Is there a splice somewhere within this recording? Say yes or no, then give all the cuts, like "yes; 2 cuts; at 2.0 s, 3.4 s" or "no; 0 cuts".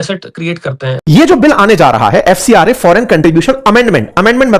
yes; 1 cut; at 1.0 s